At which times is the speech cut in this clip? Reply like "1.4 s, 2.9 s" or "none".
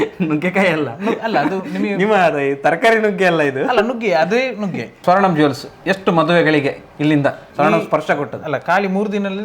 4.9 s